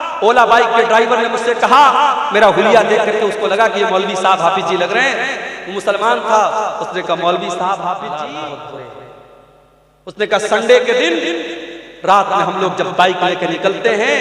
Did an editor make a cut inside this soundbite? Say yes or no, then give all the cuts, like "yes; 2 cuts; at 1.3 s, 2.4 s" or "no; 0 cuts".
yes; 1 cut; at 8.1 s